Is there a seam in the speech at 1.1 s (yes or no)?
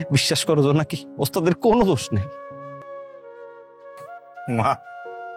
no